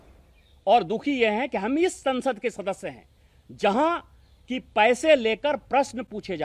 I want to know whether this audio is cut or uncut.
uncut